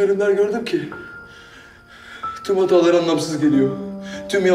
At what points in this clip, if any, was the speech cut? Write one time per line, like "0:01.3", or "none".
none